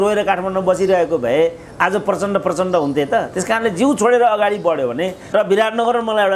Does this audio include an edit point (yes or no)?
yes